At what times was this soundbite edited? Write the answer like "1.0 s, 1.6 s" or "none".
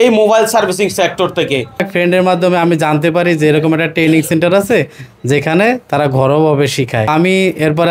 1.9 s, 7.1 s